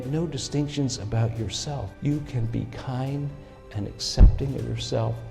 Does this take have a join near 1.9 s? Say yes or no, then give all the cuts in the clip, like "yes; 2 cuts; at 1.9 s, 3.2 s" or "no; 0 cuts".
yes; 1 cut; at 1.9 s